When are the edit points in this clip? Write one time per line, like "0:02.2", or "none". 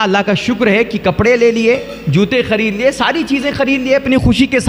none